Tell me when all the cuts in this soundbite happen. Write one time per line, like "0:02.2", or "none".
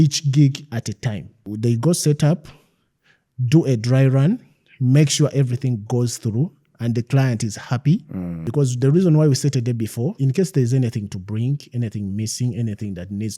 0:01.5
0:08.4
0:10.2